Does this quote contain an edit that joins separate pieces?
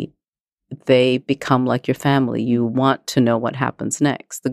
no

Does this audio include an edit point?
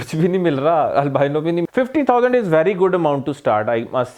yes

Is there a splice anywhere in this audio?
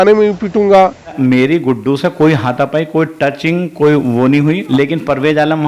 yes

